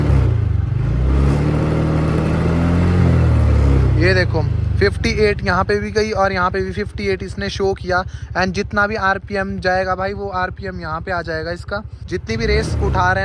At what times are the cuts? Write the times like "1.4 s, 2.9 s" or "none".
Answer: 11.9 s